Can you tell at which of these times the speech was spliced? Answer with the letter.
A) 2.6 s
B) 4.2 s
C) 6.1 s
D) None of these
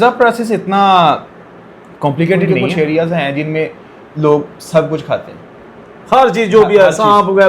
A